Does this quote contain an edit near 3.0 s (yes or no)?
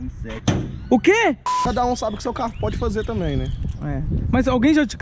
no